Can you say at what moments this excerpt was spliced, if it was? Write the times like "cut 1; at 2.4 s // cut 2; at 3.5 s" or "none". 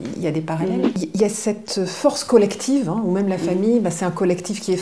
cut 1; at 1.0 s

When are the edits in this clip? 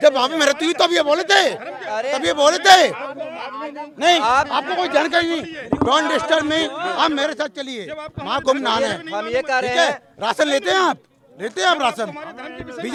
none

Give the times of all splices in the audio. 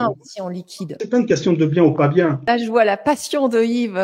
cut 1; at 1.0 s // cut 2; at 2.4 s

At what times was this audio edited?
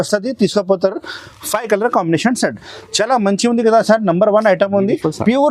none

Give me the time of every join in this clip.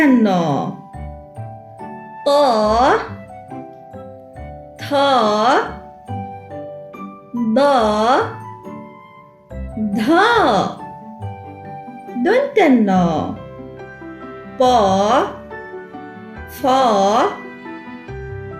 cut 1; at 10.8 s // cut 2; at 12.1 s // cut 3; at 17.4 s

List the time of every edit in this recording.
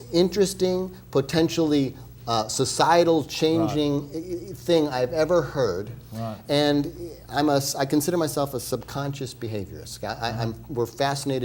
none

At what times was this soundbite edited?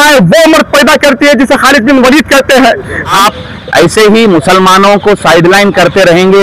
cut 1; at 3.2 s

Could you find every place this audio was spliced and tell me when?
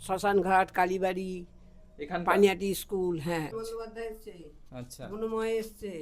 cut 1; at 3.5 s

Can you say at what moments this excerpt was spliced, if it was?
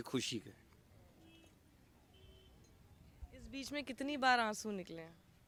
none

